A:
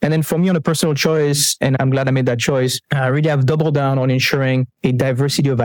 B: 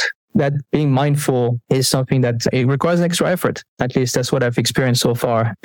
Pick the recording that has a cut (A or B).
A